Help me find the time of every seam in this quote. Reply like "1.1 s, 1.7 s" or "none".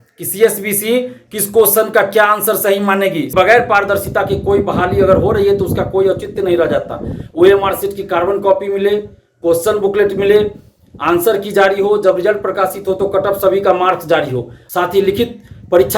3.3 s, 14.6 s